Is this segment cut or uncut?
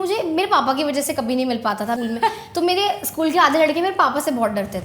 cut